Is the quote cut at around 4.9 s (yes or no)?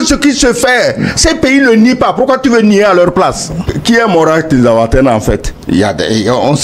no